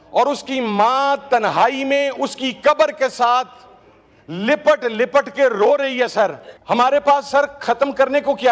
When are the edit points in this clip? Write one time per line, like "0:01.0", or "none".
0:06.5